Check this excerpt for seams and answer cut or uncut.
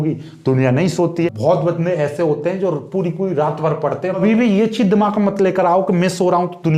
cut